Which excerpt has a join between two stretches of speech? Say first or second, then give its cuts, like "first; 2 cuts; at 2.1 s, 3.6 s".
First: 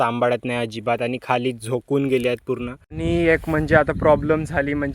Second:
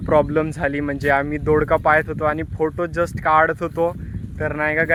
first; 1 cut; at 2.8 s